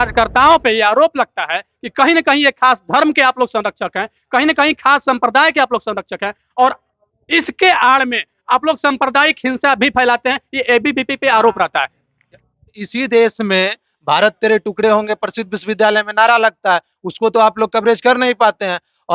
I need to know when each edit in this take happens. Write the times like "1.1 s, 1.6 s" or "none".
12.8 s